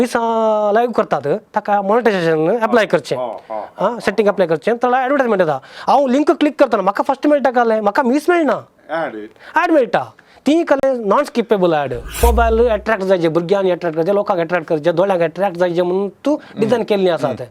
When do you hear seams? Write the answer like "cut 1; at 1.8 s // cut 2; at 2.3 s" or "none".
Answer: cut 1; at 12.2 s